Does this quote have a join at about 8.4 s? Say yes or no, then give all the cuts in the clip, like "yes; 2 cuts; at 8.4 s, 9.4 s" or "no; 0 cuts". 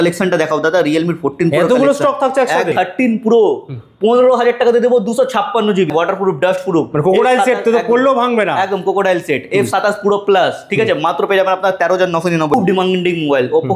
no; 3 cuts; at 2.7 s, 5.9 s, 12.5 s